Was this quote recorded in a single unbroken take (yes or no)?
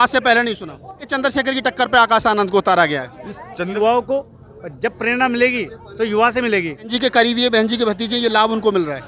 no